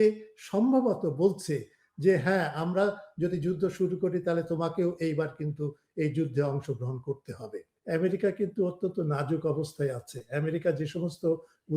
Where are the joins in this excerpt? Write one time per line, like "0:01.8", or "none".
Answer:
0:07.7